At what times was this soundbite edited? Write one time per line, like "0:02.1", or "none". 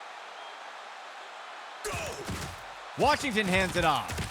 none